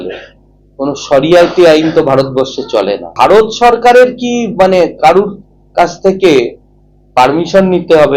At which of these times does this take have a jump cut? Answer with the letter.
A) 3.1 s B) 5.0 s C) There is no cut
A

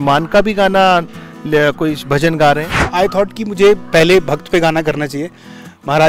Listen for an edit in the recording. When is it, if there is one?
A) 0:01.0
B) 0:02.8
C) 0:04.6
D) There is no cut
B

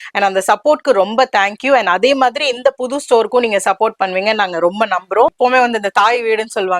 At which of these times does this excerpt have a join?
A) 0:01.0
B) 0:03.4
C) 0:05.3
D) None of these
C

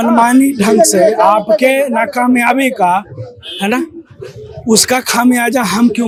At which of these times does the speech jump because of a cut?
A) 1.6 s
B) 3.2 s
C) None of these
C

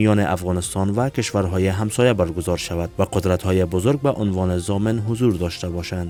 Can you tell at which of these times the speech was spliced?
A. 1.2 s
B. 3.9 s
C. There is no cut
C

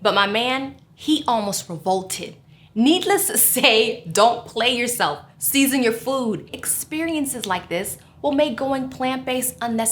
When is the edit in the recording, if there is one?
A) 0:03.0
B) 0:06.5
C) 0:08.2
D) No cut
B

